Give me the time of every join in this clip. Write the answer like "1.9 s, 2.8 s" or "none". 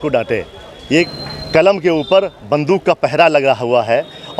1.1 s